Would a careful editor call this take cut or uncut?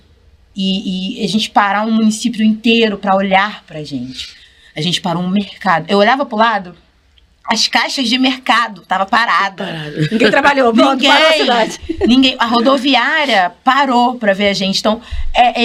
uncut